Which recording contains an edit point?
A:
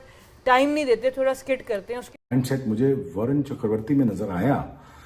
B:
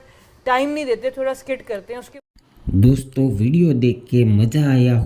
A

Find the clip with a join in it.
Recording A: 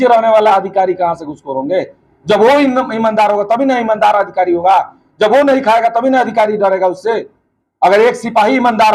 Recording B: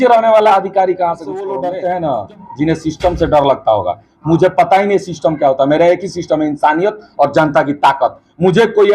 B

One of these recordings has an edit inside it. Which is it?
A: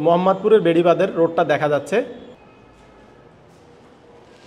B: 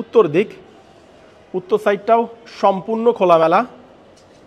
A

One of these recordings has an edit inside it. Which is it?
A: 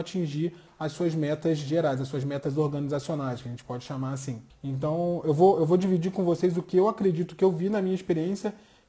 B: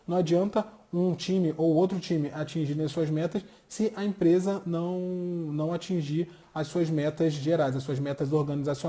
A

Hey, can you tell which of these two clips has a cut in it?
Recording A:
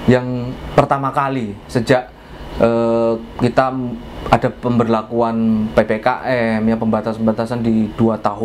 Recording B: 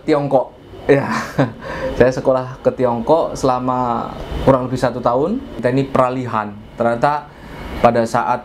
B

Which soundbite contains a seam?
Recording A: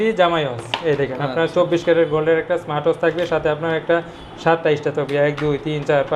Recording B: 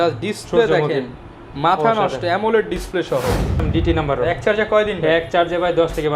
B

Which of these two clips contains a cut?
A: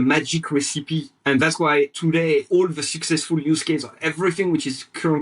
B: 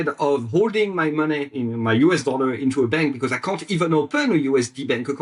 A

